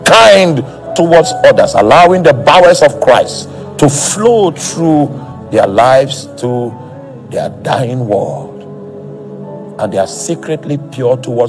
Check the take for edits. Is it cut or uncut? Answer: uncut